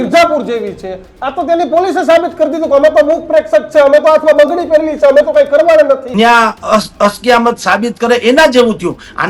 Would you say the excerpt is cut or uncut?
cut